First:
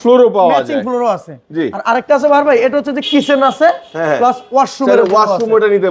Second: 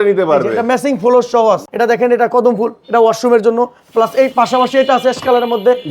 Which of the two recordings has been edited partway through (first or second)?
second